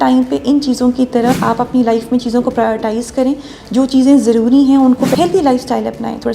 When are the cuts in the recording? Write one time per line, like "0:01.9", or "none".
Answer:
0:01.4
0:05.1